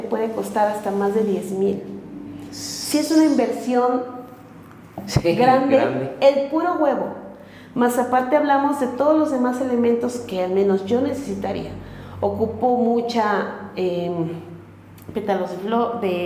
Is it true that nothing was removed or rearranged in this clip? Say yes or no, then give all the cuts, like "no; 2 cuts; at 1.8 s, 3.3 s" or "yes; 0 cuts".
yes; 0 cuts